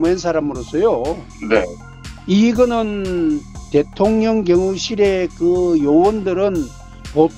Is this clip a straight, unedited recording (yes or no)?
yes